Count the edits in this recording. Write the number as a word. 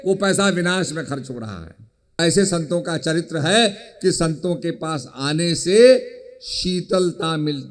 one